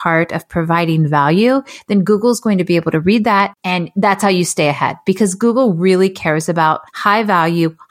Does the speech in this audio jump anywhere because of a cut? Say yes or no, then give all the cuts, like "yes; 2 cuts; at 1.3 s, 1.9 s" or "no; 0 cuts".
yes; 2 cuts; at 3.6 s, 6.9 s